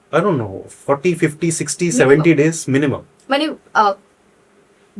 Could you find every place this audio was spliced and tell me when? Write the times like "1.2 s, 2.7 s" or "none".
none

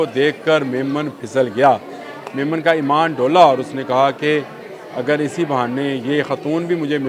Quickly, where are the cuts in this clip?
none

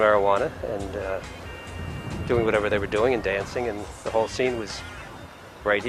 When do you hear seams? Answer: 2.1 s

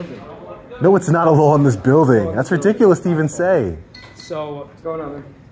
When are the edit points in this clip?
none

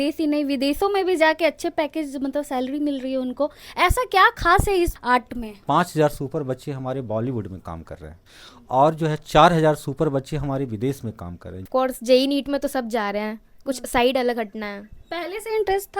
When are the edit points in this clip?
5.1 s, 11.6 s

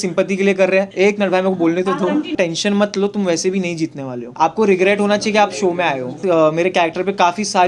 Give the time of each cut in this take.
0.9 s, 2.3 s, 4.2 s, 6.2 s

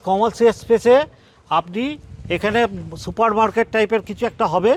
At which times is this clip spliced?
none

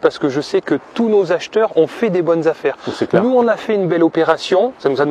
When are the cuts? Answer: none

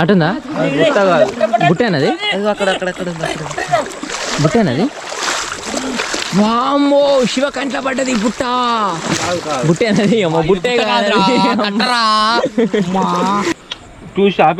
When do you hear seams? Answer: 13.7 s

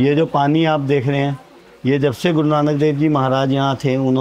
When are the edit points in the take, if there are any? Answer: none

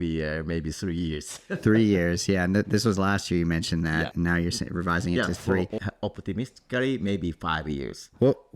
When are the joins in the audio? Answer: 4.1 s, 5.8 s

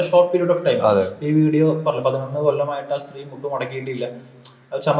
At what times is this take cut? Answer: none

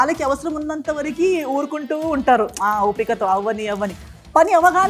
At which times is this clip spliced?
none

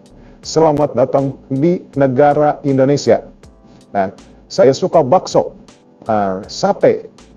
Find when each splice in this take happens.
none

